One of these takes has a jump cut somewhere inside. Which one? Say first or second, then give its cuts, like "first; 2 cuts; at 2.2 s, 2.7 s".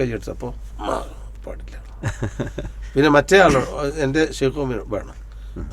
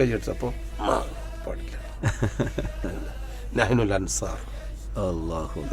second; 1 cut; at 2.8 s